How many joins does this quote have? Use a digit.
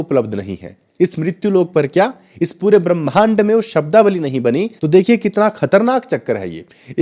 1